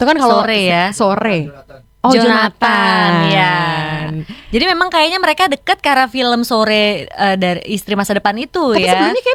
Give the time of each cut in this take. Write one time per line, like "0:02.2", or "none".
none

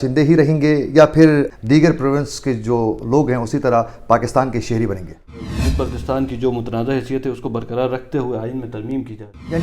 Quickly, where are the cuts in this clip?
0:01.5
0:05.4

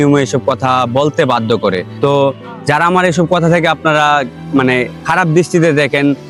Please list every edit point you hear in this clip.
none

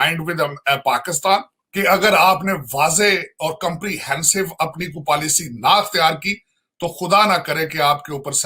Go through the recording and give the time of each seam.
0:01.6

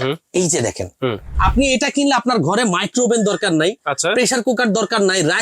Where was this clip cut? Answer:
0:01.3

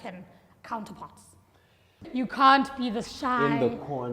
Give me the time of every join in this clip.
0:02.0

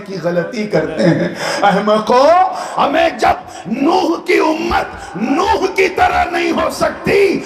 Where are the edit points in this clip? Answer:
none

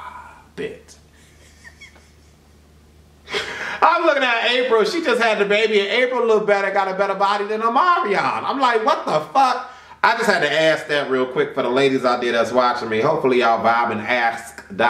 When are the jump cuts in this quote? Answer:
none

